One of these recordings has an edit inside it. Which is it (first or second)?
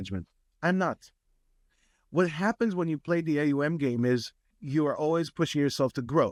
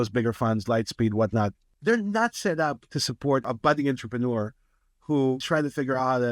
second